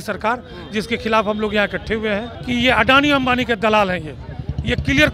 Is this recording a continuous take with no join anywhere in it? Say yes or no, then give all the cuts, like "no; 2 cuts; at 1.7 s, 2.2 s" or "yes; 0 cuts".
no; 1 cut; at 2.3 s